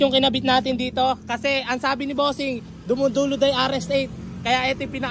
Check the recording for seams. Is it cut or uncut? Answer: uncut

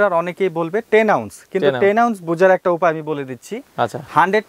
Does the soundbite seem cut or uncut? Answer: uncut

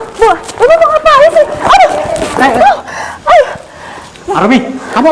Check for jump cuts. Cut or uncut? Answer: uncut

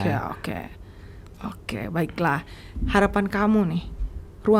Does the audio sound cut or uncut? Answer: uncut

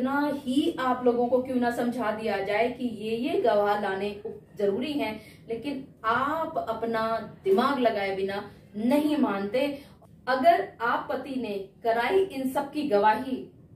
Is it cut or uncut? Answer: cut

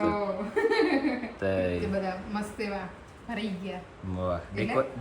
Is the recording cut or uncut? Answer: cut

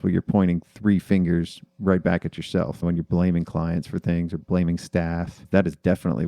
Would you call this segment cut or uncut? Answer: cut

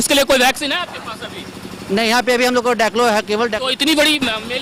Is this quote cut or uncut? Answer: uncut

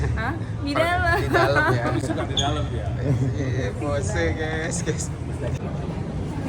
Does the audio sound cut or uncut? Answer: cut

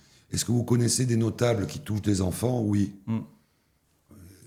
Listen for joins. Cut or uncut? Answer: uncut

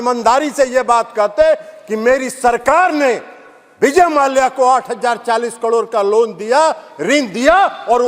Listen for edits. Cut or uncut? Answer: uncut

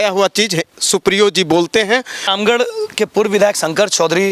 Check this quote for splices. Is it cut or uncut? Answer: cut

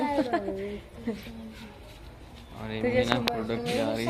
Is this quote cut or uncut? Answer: uncut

